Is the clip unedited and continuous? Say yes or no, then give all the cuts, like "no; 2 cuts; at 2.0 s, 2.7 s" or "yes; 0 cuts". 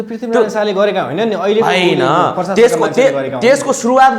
yes; 0 cuts